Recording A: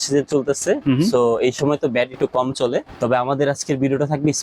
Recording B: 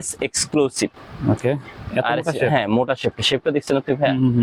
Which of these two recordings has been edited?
A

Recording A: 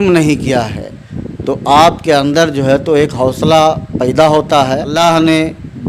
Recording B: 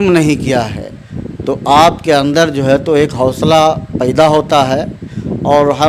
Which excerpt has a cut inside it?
A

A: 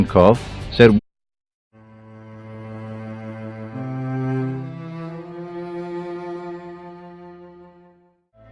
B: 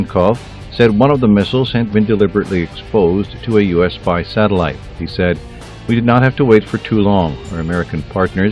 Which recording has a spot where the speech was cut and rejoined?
B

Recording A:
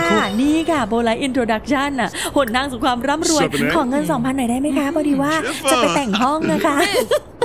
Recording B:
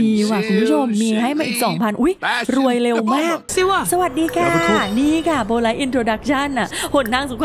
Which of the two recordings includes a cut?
B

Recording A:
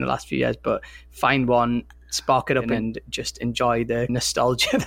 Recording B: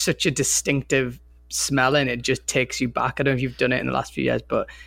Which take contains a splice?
A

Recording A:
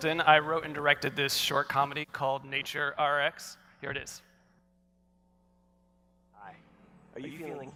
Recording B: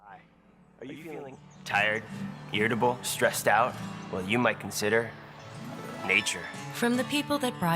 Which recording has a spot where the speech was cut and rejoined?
B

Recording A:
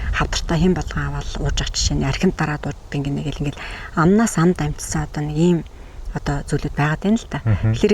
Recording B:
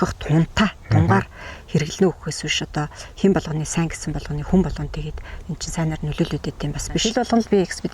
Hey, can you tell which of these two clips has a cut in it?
B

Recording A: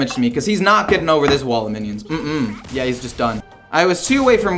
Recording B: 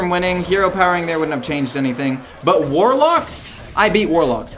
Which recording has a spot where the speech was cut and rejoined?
A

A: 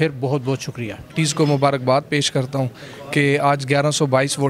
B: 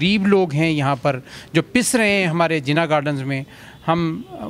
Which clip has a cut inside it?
A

